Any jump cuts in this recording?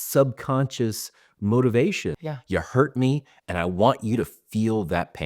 yes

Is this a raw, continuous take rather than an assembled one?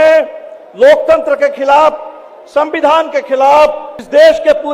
yes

